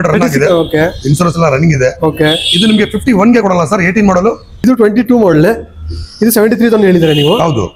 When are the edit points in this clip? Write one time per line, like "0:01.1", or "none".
0:04.6